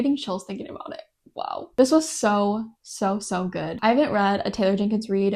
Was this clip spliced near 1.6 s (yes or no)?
no